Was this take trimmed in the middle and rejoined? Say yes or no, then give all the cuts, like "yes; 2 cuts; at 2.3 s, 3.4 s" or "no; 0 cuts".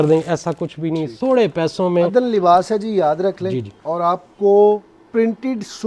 yes; 1 cut; at 1.1 s